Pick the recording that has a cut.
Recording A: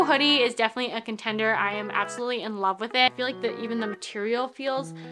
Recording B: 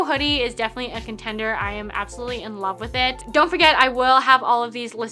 A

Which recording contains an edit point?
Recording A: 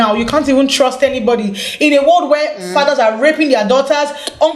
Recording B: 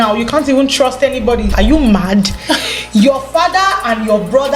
B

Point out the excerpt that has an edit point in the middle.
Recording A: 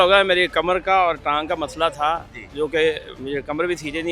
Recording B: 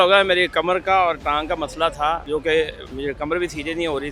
B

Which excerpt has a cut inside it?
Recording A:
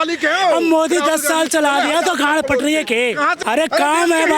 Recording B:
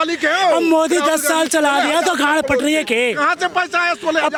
A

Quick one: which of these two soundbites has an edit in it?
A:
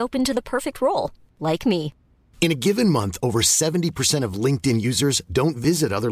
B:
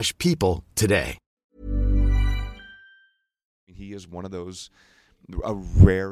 B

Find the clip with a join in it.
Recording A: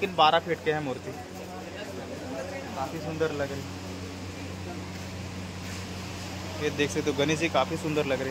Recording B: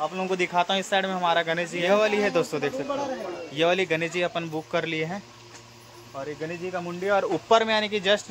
B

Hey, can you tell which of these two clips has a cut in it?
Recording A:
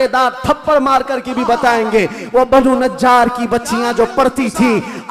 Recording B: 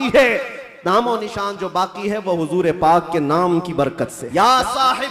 B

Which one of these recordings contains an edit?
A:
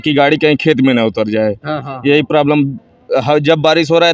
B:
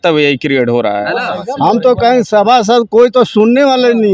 B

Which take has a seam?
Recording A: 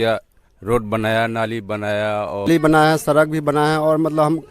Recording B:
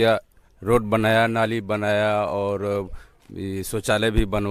A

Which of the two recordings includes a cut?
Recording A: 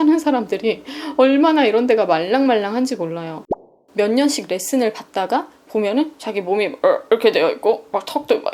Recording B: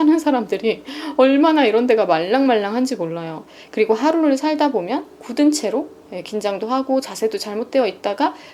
A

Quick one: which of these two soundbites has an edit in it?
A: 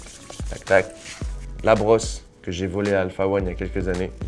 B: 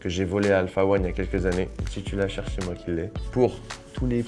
A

